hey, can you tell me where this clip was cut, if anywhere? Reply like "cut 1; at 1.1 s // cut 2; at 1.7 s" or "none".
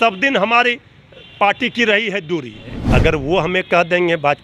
cut 1; at 2.8 s